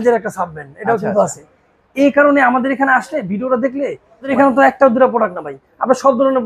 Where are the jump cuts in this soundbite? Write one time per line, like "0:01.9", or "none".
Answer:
0:04.3